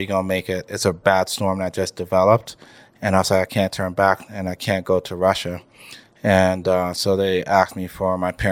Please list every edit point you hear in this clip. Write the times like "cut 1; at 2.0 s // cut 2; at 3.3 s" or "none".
none